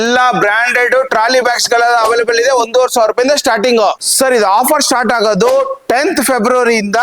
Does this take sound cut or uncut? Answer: cut